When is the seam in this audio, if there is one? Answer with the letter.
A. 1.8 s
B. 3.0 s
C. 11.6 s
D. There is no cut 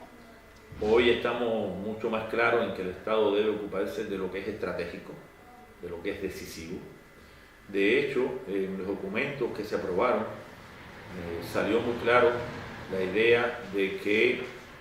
B